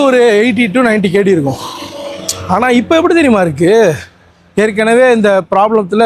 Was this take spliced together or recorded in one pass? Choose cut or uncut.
uncut